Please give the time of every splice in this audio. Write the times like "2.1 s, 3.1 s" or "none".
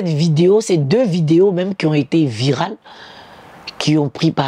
none